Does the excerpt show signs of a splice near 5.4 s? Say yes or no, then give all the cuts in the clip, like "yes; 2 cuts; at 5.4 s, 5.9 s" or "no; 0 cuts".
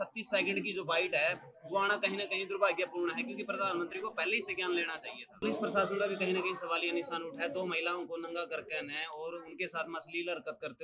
yes; 1 cut; at 5.4 s